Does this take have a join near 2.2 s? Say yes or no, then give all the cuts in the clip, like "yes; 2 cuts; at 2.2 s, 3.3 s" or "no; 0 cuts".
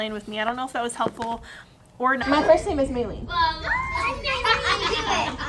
yes; 1 cut; at 2.2 s